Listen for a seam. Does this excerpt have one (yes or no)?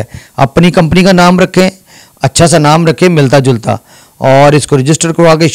no